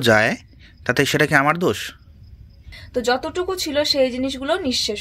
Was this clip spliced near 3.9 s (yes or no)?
no